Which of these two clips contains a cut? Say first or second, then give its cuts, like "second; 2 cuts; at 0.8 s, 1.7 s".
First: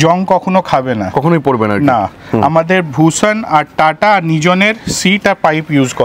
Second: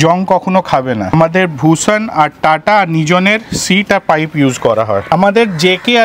second; 2 cuts; at 1.1 s, 5.1 s